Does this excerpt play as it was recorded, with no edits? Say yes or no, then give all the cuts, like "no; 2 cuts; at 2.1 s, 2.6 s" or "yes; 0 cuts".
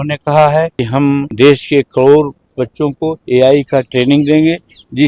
no; 2 cuts; at 1.0 s, 3.1 s